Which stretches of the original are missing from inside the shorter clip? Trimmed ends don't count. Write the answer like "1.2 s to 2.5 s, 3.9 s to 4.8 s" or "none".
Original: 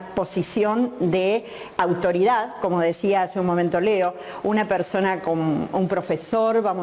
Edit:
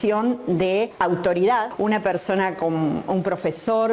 1.4 s to 1.7 s, 2.5 s to 4.4 s